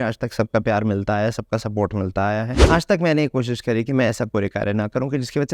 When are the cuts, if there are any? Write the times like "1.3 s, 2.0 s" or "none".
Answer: 2.6 s